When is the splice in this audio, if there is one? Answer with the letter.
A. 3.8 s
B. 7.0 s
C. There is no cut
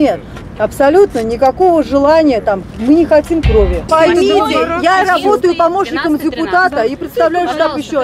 A